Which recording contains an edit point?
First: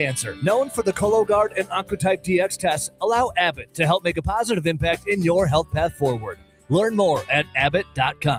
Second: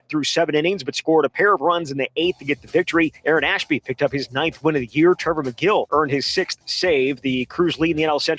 second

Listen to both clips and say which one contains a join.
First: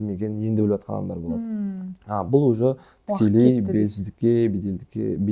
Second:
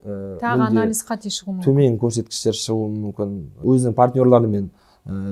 second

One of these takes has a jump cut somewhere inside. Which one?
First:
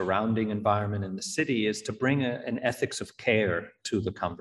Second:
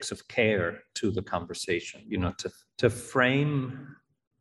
second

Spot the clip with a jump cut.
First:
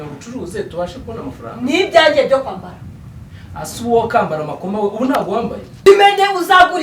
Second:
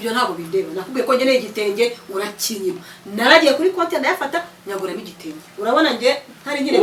first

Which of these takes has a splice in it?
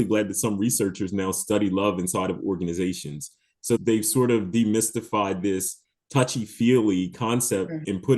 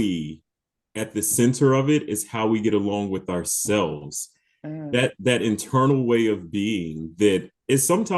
first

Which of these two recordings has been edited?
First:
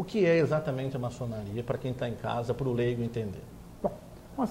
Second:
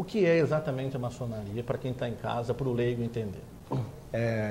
second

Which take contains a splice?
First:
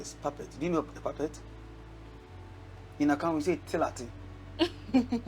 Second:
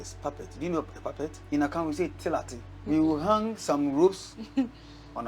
second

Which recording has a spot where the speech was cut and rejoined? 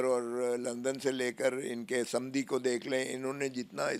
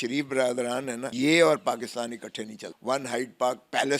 second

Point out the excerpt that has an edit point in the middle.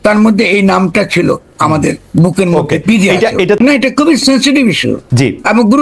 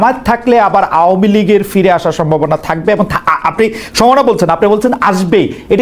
first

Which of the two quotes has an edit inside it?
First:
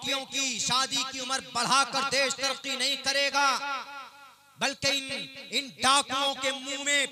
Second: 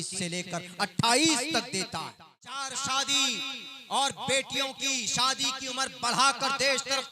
second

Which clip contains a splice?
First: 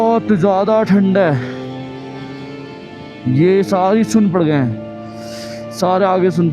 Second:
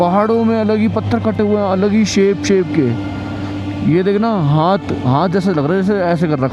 first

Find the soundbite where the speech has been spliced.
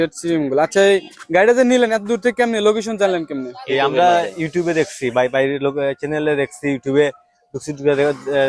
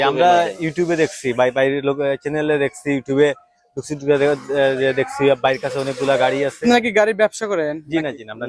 second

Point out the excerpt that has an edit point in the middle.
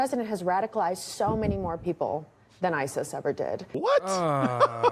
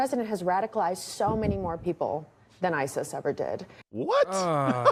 first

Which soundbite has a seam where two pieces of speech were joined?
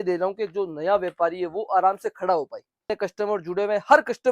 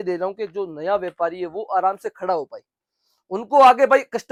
first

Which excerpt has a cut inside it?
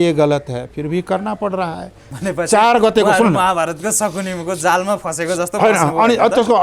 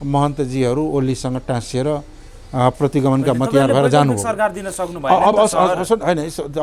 first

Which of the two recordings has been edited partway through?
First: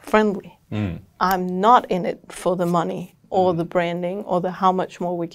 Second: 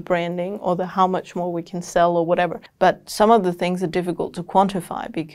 second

